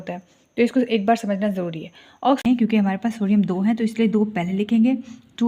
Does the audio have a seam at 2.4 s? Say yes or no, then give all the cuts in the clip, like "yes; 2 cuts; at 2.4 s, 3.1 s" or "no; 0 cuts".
yes; 1 cut; at 2.4 s